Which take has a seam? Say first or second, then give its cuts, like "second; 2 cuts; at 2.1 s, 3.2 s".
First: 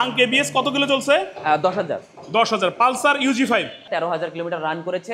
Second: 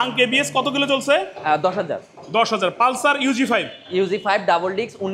first; 1 cut; at 3.8 s